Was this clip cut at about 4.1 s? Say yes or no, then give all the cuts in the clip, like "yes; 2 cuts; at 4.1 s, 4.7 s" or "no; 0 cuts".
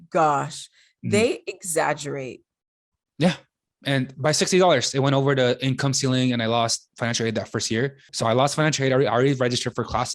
no; 2 cuts; at 6.9 s, 8.1 s